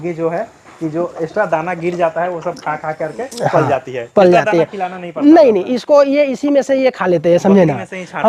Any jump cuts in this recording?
no; 0 cuts

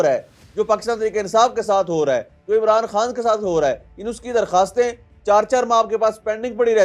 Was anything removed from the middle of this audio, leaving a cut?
no; 0 cuts

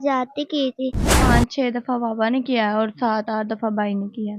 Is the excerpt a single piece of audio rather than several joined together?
no; 1 cut; at 1.3 s

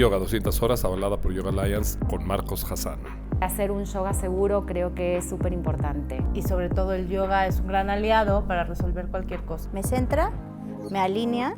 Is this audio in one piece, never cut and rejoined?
no; 1 cut; at 1.2 s

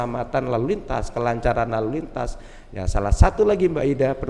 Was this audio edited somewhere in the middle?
no; 0 cuts

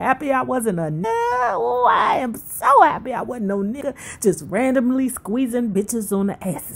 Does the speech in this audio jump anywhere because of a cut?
yes; 2 cuts; at 1.0 s, 3.8 s

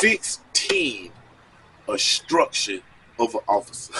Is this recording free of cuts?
yes; 0 cuts

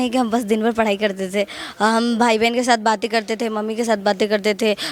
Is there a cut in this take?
no; 0 cuts

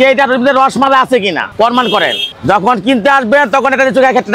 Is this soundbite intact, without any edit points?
yes; 0 cuts

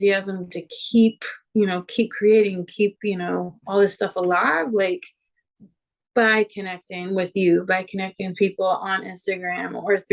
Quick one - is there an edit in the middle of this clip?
no; 0 cuts

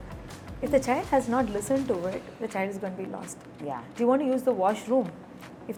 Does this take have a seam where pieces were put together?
no; 0 cuts

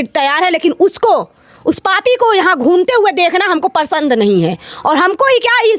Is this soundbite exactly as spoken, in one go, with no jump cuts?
yes; 0 cuts

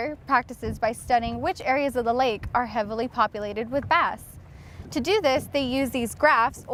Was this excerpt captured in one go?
yes; 0 cuts

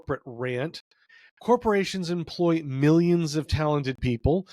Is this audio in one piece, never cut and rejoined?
no; 1 cut; at 1.1 s

